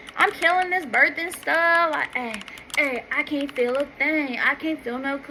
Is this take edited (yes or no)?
no